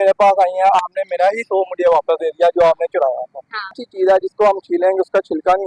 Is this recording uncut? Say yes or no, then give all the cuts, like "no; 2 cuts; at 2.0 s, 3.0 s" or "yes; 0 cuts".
no; 1 cut; at 3.7 s